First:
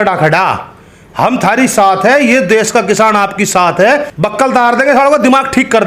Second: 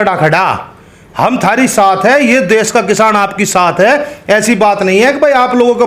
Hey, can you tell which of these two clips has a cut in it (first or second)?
first